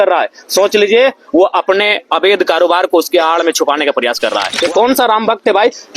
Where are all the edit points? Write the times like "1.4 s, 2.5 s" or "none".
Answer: 4.5 s